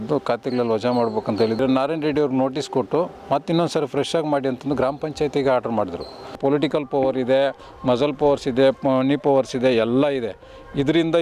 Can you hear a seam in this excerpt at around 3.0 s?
no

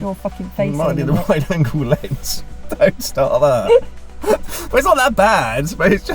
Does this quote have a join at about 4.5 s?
yes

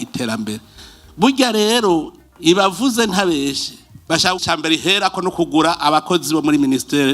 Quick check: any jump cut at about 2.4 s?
no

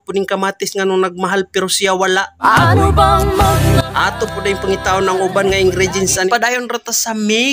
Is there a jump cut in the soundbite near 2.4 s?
no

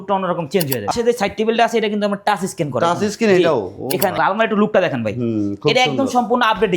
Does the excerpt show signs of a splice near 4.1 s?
yes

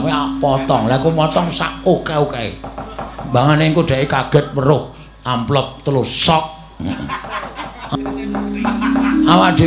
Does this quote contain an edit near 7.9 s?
yes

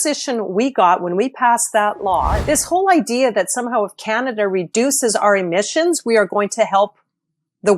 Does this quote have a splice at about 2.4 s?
yes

